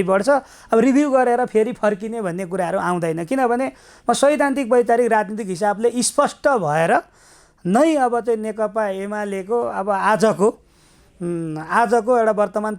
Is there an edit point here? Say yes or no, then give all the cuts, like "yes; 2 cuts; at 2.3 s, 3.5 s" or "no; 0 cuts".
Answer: no; 0 cuts